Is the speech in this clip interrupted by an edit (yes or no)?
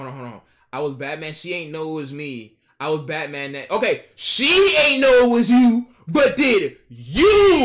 no